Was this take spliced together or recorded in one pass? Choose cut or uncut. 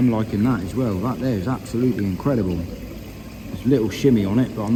uncut